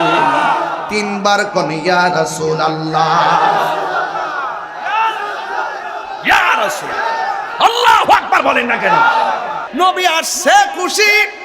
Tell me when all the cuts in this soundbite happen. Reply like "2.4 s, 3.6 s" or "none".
9.6 s